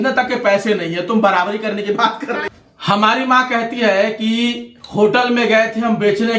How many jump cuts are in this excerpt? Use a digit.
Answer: 1